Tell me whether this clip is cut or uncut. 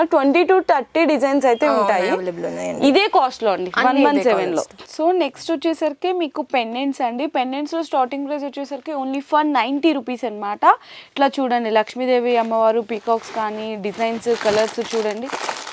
uncut